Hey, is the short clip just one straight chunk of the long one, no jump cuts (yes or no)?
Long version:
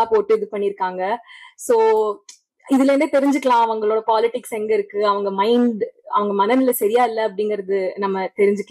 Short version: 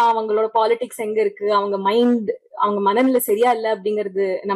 yes